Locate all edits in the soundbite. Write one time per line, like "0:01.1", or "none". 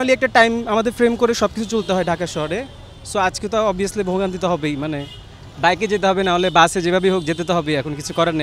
none